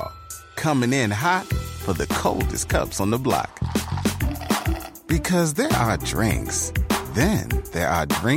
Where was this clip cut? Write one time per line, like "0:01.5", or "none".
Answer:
none